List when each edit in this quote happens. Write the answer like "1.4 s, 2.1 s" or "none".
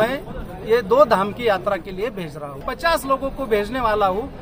2.6 s